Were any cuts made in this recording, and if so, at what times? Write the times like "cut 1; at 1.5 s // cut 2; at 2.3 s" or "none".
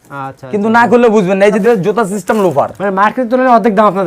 cut 1; at 1.6 s